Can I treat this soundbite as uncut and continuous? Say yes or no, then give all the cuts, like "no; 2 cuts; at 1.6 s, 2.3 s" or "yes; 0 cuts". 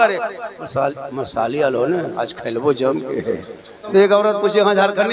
no; 1 cut; at 3.7 s